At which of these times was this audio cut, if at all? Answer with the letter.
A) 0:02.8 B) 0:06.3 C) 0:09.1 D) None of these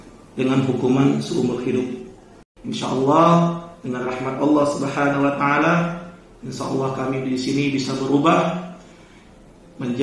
A